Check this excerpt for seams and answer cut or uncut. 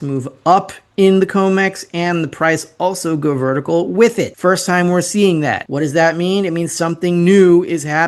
cut